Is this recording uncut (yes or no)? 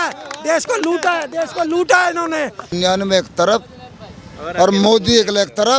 no